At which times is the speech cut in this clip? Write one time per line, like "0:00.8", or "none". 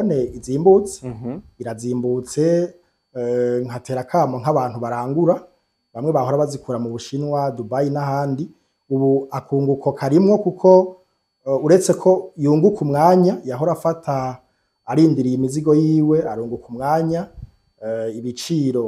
none